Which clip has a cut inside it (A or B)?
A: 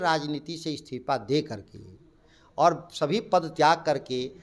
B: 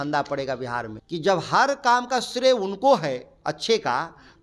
B